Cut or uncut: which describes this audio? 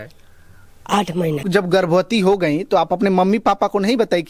cut